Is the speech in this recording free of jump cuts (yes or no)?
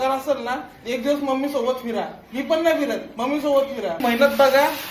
no